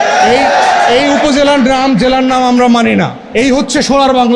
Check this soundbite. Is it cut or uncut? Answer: cut